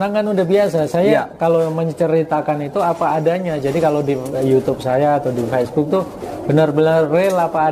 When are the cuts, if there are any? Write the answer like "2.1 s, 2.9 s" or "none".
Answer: none